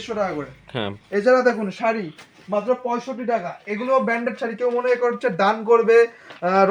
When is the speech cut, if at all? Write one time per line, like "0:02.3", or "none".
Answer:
none